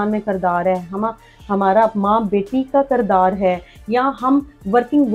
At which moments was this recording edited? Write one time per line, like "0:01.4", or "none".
none